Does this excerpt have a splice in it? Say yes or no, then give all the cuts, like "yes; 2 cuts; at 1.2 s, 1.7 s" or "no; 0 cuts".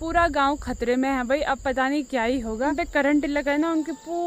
yes; 1 cut; at 2.7 s